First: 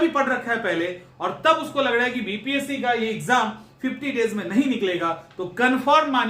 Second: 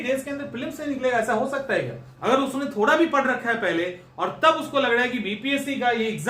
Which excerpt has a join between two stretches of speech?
second; 1 cut; at 2.0 s

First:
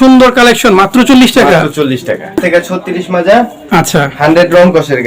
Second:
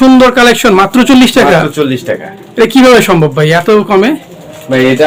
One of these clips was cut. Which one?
first; 1 cut; at 2.4 s

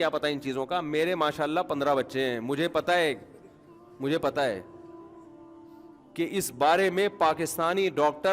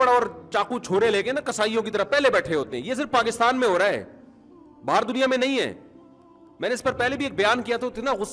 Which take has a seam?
first; 2 cuts; at 4.7 s, 6.1 s

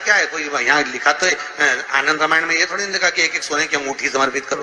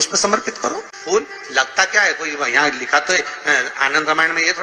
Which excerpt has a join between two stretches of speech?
second; 1 cut; at 1.0 s

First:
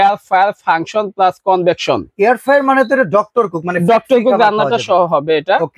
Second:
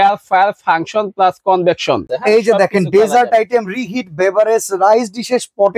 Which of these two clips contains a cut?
second; 1 cut; at 2.1 s

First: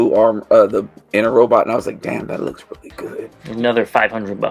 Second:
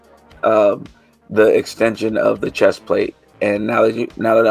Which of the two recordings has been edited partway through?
first; 1 cut; at 3.4 s

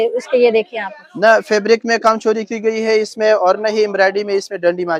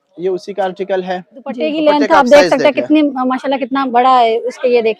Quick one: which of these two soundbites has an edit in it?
second; 1 cut; at 1.7 s

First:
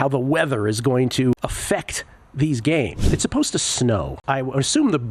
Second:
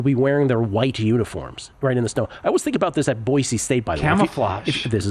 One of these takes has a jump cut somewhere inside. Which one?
first; 3 cuts; at 1.3 s, 3.1 s, 4.2 s

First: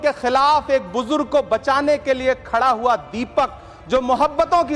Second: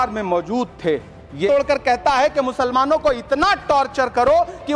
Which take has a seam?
second; 1 cut; at 1.5 s

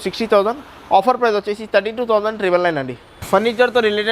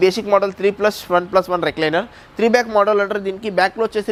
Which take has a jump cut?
first; 1 cut; at 3.1 s

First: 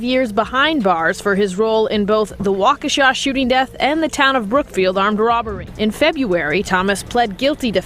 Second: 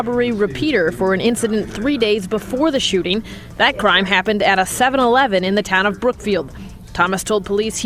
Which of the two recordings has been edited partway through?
first; 1 cut; at 5.7 s

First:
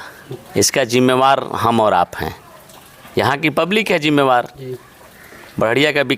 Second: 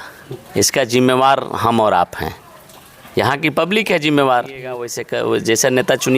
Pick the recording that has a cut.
second; 1 cut; at 5.0 s

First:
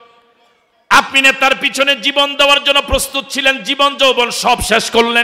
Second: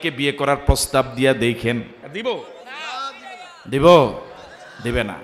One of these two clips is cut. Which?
second; 1 cut; at 2.0 s

